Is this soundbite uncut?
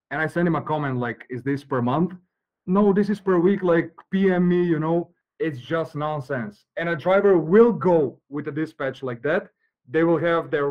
no; 1 cut; at 5.2 s

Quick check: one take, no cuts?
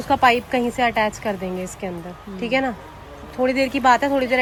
yes; 0 cuts

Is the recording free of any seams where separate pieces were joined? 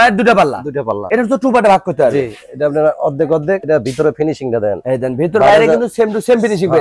yes; 0 cuts

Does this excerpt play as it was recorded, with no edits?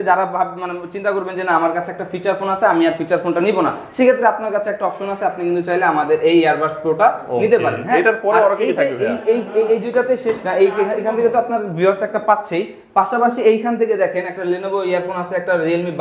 yes; 0 cuts

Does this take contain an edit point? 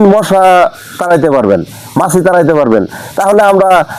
no; 0 cuts

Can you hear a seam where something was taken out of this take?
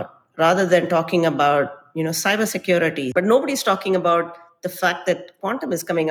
yes; 1 cut; at 3.1 s

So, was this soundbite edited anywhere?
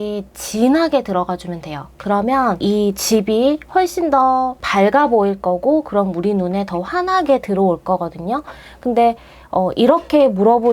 yes; 2 cuts; at 2.6 s, 4.6 s

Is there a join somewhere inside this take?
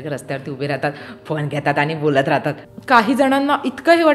yes; 1 cut; at 2.7 s

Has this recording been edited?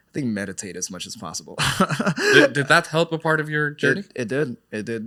no; 0 cuts

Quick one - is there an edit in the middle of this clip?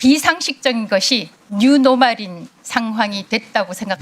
no; 0 cuts

